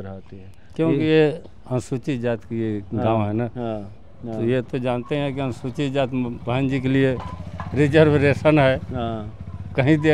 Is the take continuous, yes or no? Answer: yes